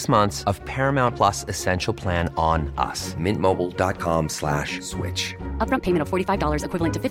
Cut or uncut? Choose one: uncut